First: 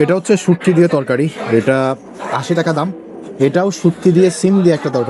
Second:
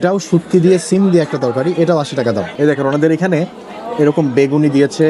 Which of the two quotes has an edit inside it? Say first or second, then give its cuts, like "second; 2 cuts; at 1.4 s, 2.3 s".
second; 1 cut; at 2.5 s